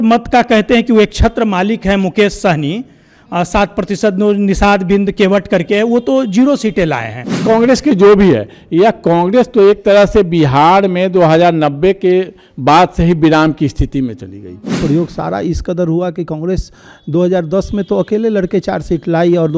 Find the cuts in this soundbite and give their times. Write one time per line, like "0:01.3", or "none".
0:07.4
0:14.8